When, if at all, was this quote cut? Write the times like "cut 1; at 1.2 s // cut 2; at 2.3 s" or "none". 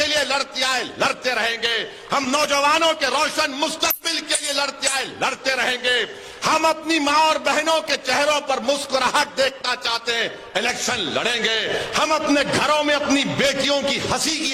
none